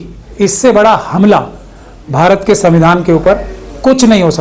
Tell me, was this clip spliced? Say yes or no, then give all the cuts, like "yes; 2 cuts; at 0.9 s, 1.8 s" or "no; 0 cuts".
no; 0 cuts